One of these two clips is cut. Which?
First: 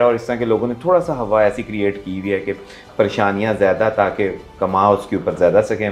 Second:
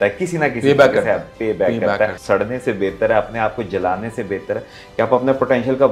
second; 1 cut; at 2.2 s

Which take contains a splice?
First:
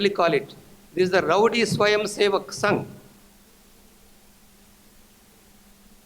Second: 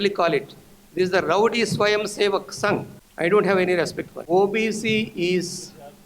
second; 2 cuts; at 3.0 s, 4.1 s

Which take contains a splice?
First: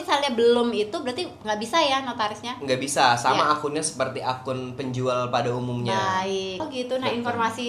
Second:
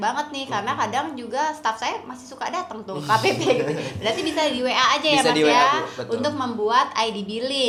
first; 1 cut; at 6.7 s

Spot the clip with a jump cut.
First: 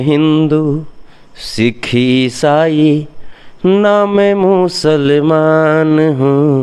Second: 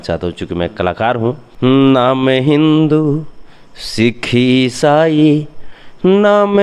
second; 1 cut; at 1.5 s

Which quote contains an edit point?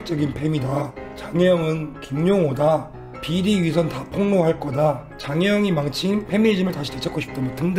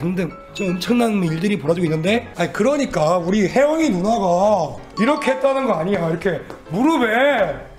second; 1 cut; at 2.3 s

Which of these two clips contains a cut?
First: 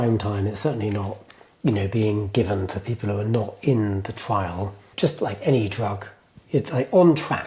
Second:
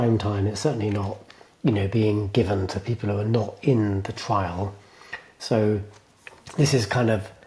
first; 1 cut; at 4.9 s

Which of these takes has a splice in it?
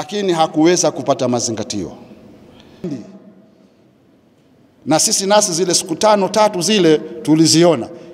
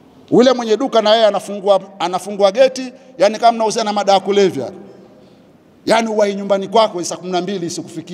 first; 1 cut; at 2.9 s

